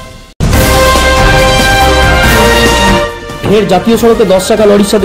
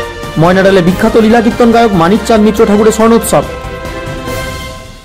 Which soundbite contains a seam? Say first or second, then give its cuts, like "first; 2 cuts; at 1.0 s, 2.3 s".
first; 1 cut; at 3.2 s